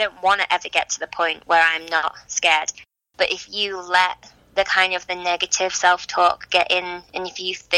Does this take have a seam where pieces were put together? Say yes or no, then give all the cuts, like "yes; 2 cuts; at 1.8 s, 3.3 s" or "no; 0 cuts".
yes; 1 cut; at 2.7 s